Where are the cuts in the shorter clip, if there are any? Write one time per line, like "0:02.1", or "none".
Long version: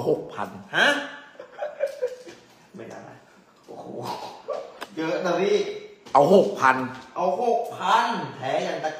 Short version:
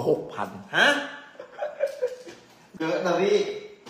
0:02.7